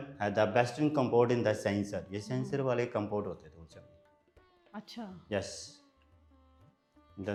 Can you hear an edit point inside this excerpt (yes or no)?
no